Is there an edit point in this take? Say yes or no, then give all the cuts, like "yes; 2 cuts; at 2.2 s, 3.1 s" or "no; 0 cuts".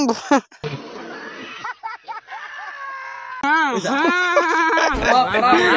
yes; 1 cut; at 3.4 s